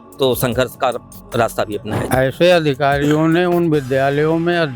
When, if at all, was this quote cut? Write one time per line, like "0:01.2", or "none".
0:02.0